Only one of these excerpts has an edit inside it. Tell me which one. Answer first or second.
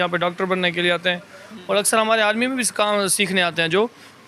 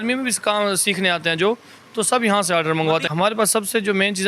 second